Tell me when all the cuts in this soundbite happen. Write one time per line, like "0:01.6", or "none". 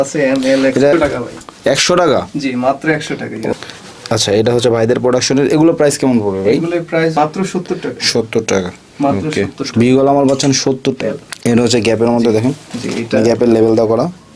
0:00.9
0:03.5
0:07.1
0:11.0